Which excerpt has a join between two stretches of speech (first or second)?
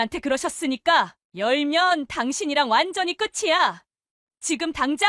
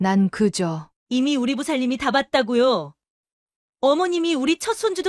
first